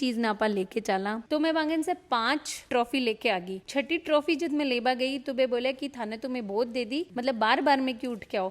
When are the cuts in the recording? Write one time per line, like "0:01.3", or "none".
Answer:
0:01.2